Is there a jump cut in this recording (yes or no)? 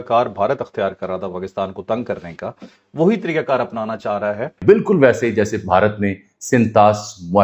yes